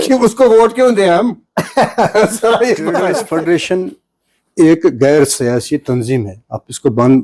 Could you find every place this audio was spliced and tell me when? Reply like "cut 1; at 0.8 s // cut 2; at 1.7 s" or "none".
cut 1; at 3.1 s